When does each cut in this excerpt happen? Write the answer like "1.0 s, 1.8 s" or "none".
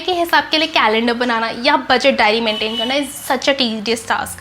none